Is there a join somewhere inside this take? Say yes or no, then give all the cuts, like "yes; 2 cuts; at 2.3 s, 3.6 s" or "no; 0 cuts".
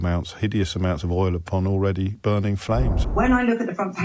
yes; 1 cut; at 3.0 s